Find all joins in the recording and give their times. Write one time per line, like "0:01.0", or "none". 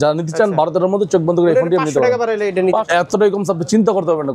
0:02.9